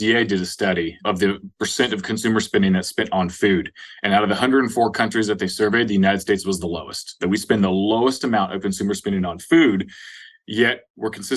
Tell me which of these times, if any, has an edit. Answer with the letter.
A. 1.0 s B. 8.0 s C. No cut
A